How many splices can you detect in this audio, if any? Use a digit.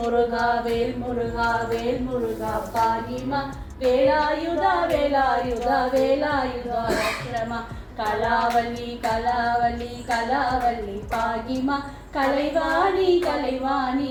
0